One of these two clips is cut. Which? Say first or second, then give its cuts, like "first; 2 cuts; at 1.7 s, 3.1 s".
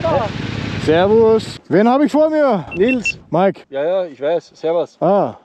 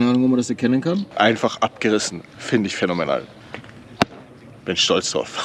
second; 1 cut; at 1.1 s